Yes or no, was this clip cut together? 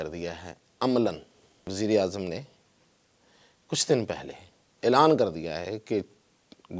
yes